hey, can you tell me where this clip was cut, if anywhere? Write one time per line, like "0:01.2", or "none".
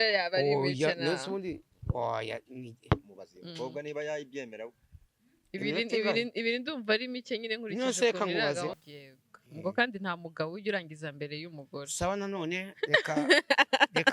0:08.8